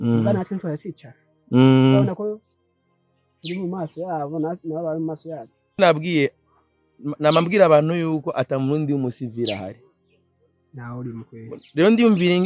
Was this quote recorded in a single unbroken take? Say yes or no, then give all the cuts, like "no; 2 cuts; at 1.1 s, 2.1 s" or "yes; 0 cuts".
no; 1 cut; at 5.8 s